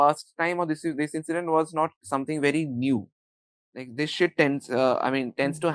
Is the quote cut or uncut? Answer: uncut